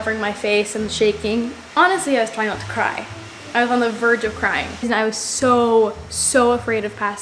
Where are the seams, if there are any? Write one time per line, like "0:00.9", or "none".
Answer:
0:01.6
0:04.9